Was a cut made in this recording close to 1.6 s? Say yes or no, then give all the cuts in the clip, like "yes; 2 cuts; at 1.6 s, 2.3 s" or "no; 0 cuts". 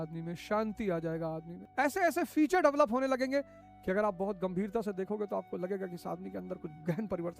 yes; 1 cut; at 1.6 s